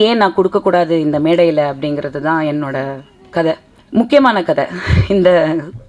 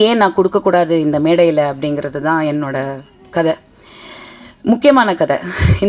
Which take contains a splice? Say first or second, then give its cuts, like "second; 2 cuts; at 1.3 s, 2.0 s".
first; 1 cut; at 3.7 s